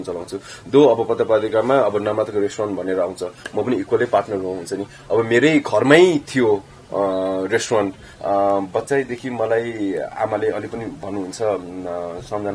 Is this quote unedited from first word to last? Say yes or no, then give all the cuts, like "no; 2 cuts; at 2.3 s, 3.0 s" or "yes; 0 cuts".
no; 1 cut; at 8.0 s